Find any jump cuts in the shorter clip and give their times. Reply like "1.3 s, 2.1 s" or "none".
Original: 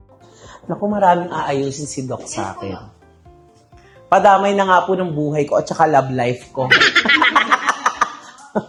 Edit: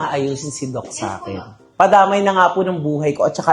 1.6 s

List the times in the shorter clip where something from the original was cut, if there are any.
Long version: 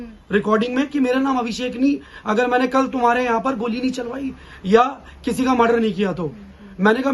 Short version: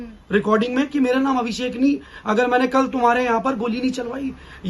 none

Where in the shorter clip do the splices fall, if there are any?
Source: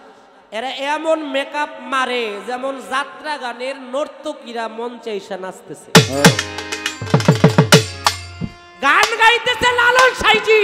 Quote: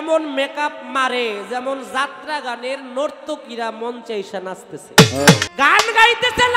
5.5 s

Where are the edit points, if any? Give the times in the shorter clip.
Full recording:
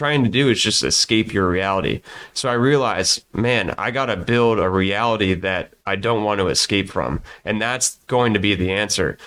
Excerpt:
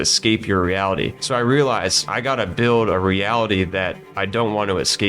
1.2 s, 2.1 s

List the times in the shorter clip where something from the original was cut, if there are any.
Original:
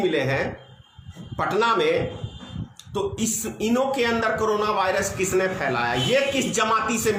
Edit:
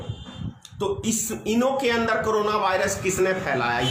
none

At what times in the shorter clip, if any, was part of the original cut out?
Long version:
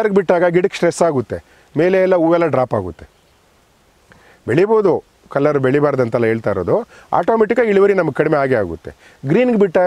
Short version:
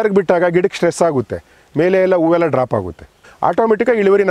3.3 s

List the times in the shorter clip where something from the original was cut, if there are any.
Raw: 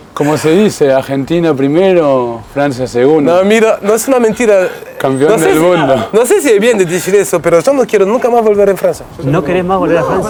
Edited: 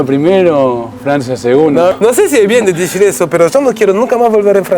1.9 s

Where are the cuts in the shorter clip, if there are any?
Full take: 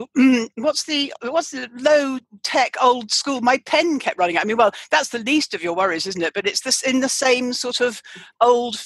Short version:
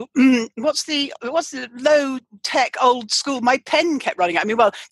none

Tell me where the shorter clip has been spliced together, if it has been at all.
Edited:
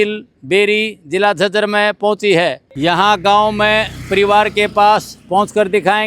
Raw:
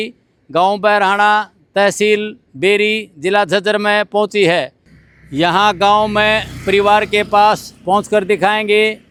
2.7 s

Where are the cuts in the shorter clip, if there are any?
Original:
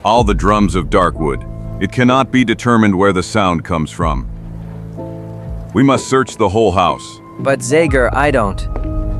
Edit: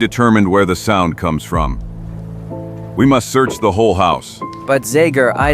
2.9 s

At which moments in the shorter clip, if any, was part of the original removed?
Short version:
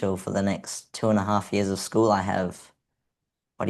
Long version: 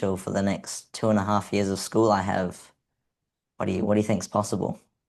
none

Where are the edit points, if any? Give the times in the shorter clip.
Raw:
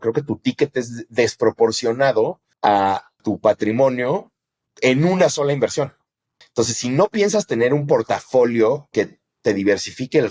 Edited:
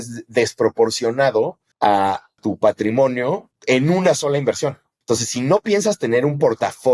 3.5 s, 4.9 s

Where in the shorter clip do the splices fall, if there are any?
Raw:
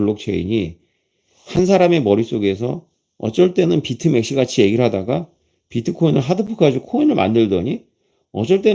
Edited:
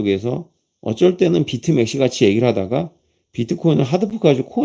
none

